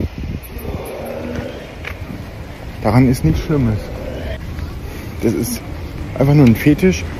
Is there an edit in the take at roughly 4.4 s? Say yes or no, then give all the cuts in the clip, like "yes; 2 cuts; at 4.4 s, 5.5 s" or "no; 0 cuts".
yes; 1 cut; at 4.4 s